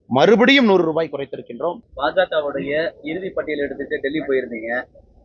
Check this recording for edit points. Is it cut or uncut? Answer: cut